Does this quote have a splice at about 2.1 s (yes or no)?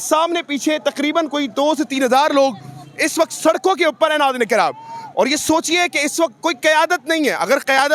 no